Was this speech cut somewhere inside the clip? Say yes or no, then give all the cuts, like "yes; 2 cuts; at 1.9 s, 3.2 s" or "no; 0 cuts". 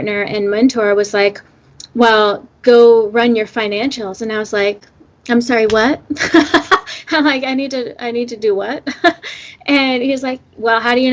no; 0 cuts